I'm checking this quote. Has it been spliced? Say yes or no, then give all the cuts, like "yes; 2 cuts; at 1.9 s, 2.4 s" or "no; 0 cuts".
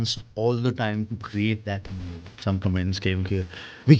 yes; 1 cut; at 2.4 s